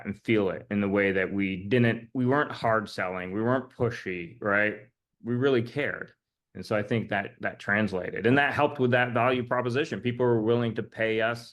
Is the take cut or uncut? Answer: uncut